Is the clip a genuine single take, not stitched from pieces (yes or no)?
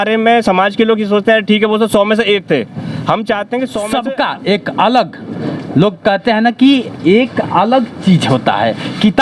no